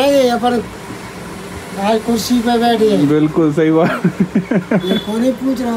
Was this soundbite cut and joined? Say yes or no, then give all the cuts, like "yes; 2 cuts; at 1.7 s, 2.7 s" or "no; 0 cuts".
no; 0 cuts